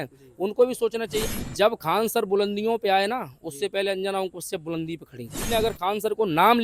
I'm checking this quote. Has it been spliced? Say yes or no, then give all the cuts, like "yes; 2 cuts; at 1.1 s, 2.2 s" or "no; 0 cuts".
yes; 2 cuts; at 1.3 s, 5.4 s